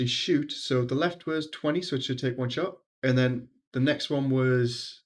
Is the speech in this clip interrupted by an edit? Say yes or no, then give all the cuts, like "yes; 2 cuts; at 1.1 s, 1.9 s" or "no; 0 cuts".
yes; 1 cut; at 2.9 s